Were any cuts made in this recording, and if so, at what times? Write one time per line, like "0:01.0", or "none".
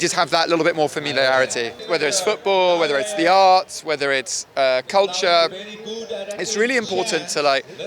0:01.8